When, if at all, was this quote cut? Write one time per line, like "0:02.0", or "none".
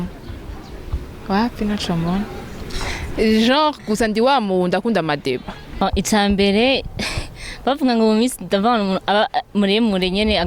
0:05.6